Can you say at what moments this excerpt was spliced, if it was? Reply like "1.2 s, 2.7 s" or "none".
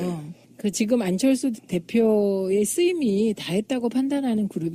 1.7 s